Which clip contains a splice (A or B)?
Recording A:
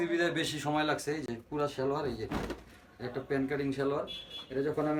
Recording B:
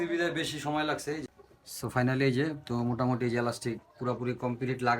B